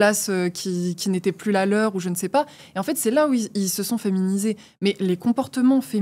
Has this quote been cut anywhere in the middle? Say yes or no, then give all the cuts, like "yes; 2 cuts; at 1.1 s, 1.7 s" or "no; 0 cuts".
no; 0 cuts